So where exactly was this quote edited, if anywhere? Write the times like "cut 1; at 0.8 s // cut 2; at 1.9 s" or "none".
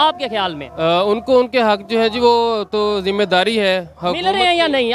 none